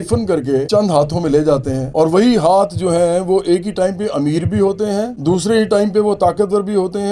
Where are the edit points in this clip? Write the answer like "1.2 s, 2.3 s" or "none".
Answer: none